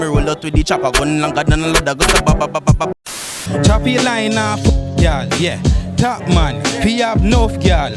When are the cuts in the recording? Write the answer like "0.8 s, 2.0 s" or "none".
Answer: 3.0 s